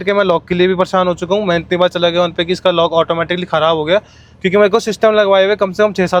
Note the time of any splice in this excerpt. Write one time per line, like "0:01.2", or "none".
none